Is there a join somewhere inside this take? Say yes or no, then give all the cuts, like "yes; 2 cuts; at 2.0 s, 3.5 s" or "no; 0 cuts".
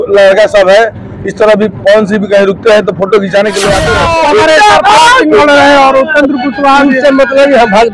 yes; 1 cut; at 3.9 s